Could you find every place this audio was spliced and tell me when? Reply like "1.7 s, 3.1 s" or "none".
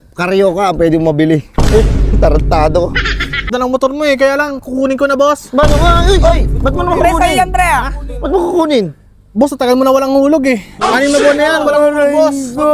3.4 s